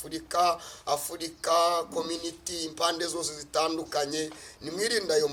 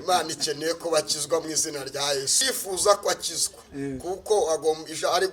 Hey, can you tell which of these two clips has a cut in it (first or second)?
second